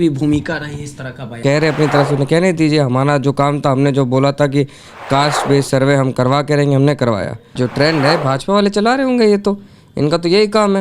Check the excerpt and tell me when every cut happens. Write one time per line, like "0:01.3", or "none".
0:01.4
0:07.6